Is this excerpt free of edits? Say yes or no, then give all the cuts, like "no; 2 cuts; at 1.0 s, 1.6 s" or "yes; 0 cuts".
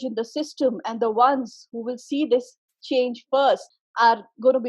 no; 1 cut; at 3.8 s